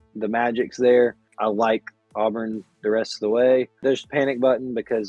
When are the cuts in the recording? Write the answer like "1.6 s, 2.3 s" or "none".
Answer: 1.3 s, 3.7 s